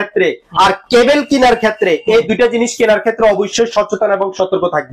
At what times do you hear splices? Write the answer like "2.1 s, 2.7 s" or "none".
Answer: none